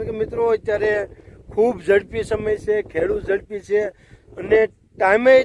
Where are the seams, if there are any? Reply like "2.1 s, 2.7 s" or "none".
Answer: none

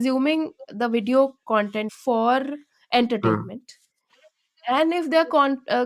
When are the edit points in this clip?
1.9 s

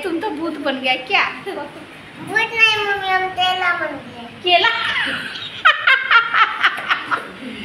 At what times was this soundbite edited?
none

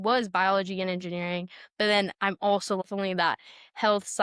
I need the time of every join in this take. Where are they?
2.8 s

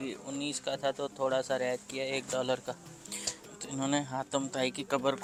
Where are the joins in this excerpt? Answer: none

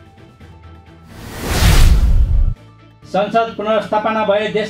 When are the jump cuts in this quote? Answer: 0.9 s

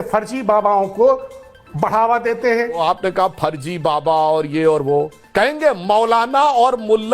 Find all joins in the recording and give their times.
2.8 s, 5.2 s

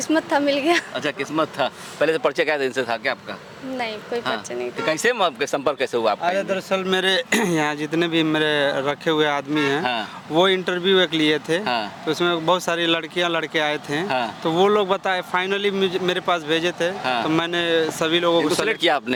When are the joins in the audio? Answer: none

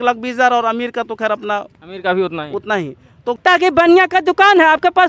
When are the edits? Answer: 3.4 s

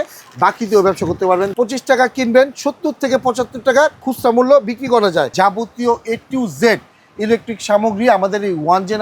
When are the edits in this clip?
1.5 s, 5.3 s

